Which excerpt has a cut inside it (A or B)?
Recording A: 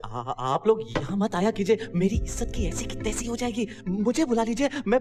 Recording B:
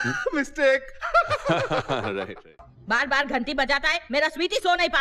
B